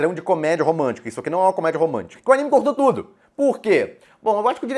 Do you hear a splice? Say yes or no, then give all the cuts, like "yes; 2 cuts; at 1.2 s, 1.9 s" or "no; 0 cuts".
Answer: yes; 1 cut; at 2.1 s